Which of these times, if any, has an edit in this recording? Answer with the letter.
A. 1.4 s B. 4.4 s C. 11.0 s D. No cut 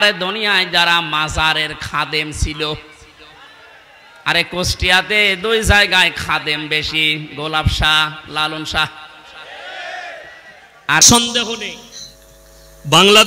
C